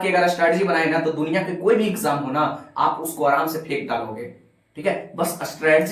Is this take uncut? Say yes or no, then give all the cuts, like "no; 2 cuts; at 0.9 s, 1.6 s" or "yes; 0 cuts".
yes; 0 cuts